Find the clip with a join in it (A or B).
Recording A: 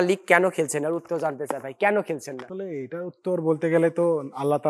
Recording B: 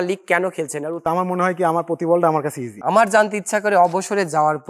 B